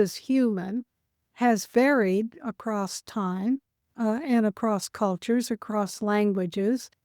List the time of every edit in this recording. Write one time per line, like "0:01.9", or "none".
0:01.3
0:03.8